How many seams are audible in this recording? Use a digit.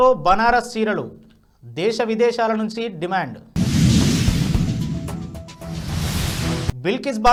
0